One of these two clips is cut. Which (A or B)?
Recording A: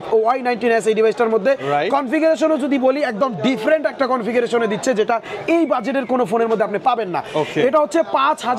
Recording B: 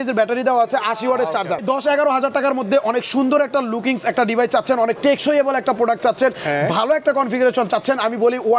B